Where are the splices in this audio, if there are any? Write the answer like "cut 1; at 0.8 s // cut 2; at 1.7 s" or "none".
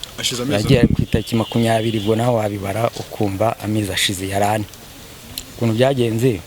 cut 1; at 4.9 s